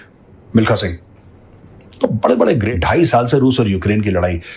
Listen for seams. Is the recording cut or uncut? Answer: cut